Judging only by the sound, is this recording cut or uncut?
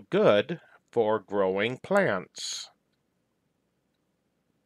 uncut